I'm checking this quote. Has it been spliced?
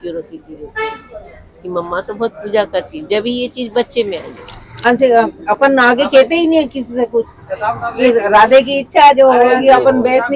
yes; 1 cut; at 4.9 s

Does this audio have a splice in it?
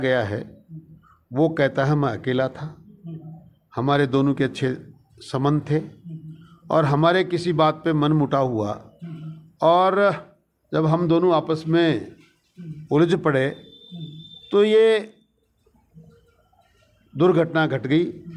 no; 0 cuts

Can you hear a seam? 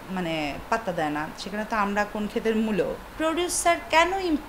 yes; 1 cut; at 3.1 s

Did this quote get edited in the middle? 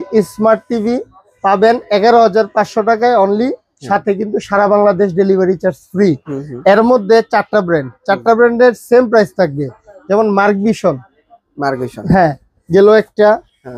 no; 0 cuts

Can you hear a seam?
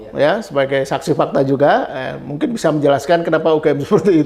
no; 0 cuts

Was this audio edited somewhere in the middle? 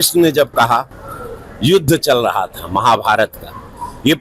no; 0 cuts

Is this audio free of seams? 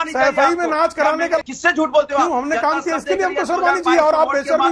no; 1 cut; at 1.4 s

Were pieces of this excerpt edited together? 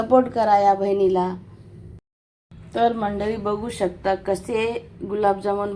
yes; 1 cut; at 2.0 s

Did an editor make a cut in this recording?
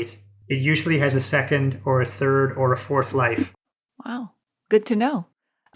no; 0 cuts

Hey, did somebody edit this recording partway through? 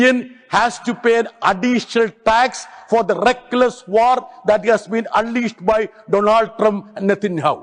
no; 0 cuts

